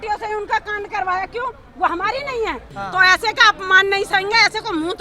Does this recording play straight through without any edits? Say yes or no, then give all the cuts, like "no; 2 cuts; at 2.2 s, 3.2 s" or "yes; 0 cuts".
no; 1 cut; at 2.7 s